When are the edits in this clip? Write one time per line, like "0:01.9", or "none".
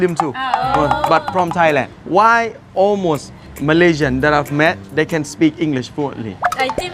none